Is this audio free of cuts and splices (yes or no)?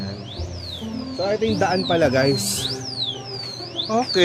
yes